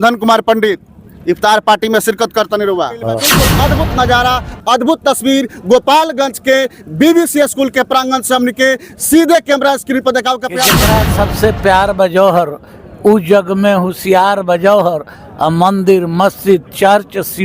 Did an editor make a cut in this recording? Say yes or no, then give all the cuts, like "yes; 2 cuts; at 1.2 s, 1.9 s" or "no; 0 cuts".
yes; 2 cuts; at 3.4 s, 10.8 s